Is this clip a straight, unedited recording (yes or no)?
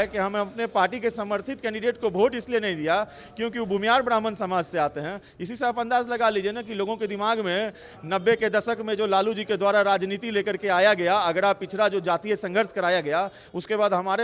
yes